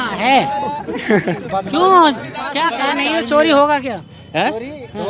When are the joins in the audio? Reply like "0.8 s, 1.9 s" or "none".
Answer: 2.7 s